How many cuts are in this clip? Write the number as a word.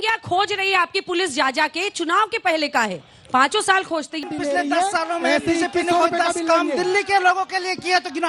one